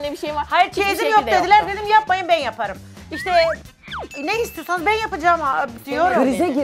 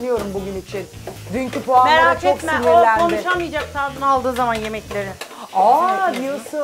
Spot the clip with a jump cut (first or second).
first